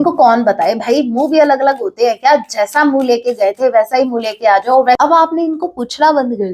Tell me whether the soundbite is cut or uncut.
cut